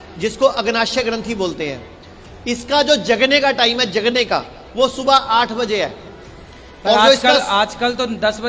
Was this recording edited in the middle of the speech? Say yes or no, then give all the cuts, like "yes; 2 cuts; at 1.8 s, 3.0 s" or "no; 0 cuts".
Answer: no; 0 cuts